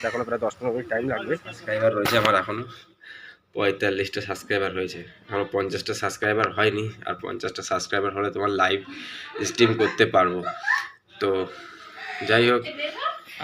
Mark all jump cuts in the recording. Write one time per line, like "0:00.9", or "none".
0:01.5